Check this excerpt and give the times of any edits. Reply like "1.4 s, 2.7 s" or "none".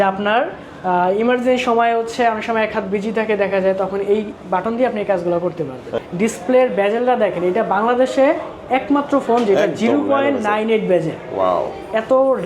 6.0 s